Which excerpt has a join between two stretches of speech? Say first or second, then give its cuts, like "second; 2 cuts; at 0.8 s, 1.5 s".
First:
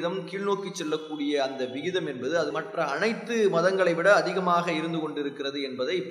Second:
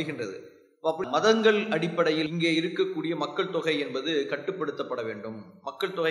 second; 1 cut; at 1.0 s